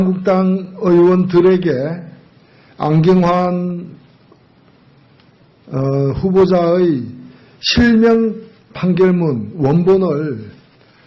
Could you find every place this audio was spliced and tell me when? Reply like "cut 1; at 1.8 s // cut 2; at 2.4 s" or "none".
cut 1; at 2.6 s